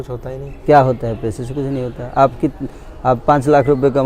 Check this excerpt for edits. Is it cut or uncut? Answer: uncut